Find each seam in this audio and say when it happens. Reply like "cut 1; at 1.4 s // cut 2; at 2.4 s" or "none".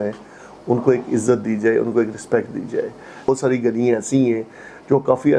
cut 1; at 3.3 s